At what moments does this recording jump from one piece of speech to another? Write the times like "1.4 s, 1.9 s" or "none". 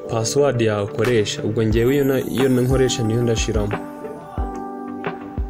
3.7 s